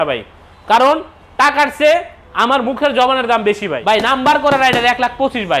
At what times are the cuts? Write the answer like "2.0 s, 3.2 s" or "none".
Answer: 4.1 s